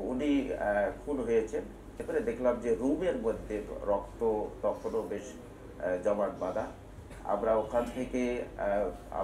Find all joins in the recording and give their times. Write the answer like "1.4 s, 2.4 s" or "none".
2.0 s